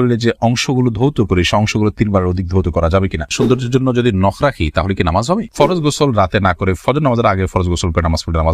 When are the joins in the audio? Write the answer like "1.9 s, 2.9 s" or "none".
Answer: 3.3 s, 5.5 s